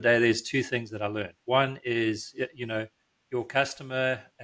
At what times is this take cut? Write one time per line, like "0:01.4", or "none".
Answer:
none